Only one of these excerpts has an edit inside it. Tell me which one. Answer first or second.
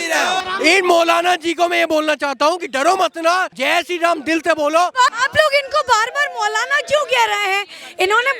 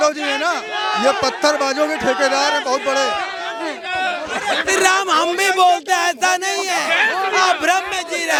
first